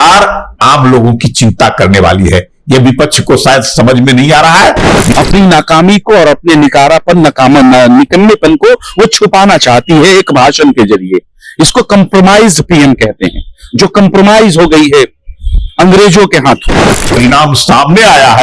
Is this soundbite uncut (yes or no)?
no